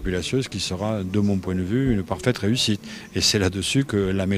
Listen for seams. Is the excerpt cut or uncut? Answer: uncut